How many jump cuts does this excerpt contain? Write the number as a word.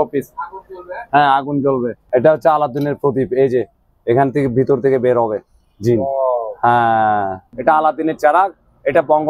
two